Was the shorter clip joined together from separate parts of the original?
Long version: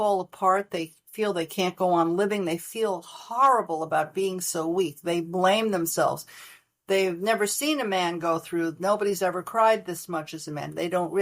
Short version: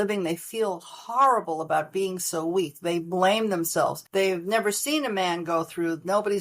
yes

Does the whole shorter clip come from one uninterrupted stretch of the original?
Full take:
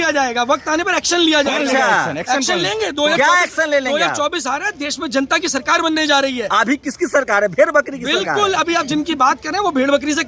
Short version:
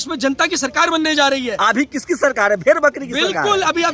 yes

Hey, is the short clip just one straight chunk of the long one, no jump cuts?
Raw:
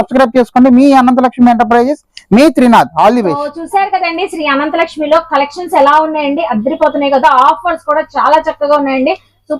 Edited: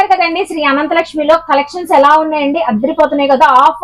yes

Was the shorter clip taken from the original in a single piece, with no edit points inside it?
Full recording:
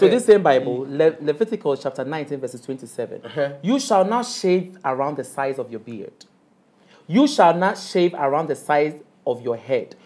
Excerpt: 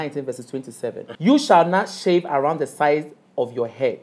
no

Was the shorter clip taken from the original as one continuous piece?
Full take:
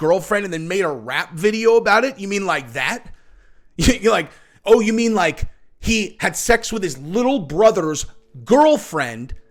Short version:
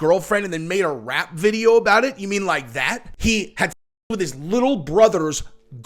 no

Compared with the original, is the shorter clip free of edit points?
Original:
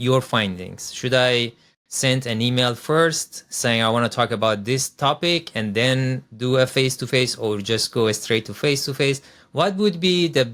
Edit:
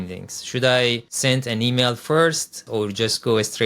no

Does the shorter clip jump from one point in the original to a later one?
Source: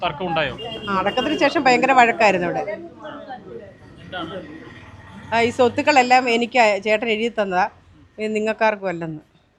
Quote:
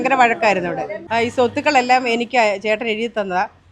yes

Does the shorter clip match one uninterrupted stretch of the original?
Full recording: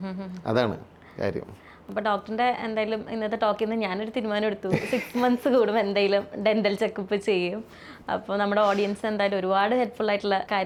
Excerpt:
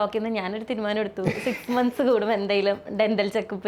yes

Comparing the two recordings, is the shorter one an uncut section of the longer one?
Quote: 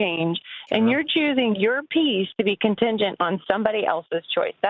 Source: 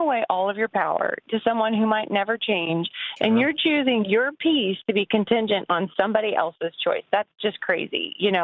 yes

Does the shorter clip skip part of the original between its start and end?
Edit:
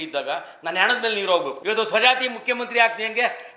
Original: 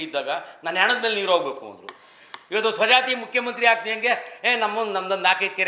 yes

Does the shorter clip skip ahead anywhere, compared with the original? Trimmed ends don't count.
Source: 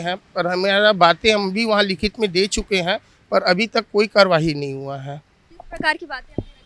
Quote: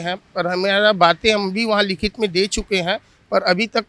no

